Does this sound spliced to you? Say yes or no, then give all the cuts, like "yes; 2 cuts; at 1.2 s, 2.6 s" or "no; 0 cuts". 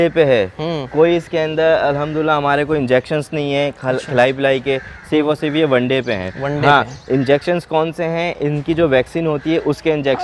no; 0 cuts